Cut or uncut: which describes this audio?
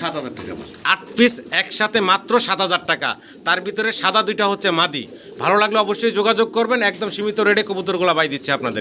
uncut